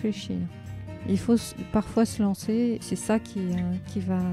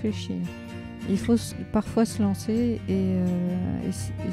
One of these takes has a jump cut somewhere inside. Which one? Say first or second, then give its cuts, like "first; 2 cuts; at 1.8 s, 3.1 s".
first; 1 cut; at 2.8 s